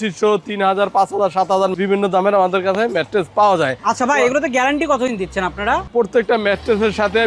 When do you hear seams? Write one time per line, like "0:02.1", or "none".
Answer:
none